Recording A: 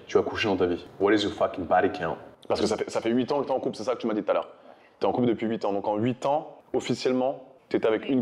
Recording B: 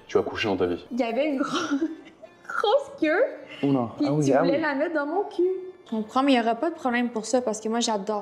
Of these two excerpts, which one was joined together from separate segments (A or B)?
B